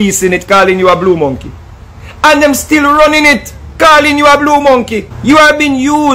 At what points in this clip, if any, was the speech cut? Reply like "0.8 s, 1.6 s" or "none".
5.1 s